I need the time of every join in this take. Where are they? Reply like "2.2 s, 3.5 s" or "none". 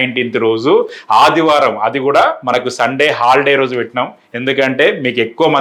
none